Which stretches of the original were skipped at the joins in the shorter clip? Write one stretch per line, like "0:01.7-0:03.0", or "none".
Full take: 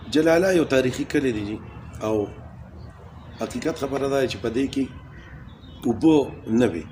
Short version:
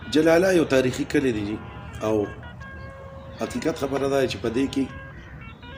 none